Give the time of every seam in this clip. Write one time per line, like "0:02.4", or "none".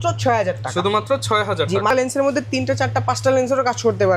0:01.9